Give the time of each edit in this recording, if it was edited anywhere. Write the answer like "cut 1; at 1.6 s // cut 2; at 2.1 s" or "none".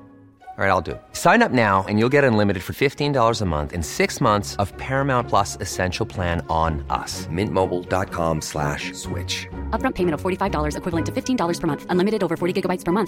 none